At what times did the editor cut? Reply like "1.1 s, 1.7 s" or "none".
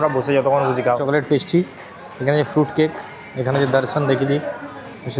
1.0 s